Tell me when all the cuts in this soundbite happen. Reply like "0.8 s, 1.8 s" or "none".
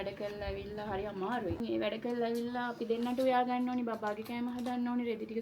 1.5 s